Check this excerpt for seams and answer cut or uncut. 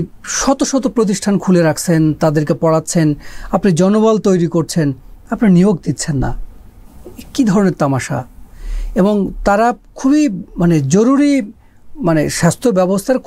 uncut